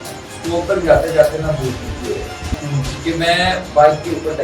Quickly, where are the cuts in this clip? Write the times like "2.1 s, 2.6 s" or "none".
2.6 s